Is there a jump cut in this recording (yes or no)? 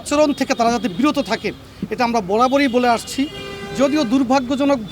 no